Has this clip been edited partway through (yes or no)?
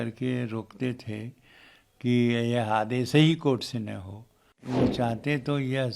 yes